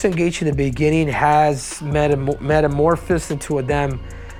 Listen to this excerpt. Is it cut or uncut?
uncut